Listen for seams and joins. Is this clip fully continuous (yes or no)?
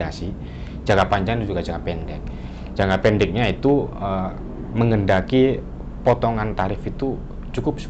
yes